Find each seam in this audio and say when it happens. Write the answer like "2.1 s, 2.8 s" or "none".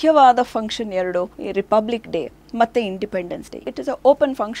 1.4 s, 3.6 s